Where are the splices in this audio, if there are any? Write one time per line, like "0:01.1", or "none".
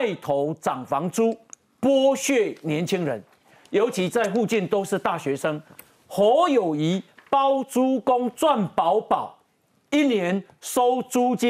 none